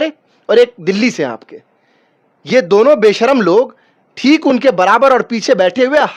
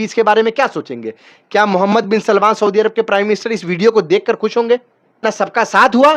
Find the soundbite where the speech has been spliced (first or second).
second